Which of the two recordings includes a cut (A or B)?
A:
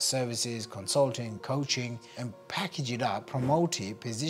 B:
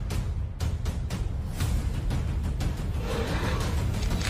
A